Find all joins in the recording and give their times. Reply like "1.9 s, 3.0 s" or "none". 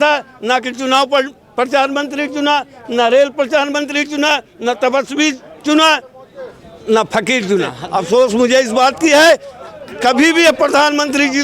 7.8 s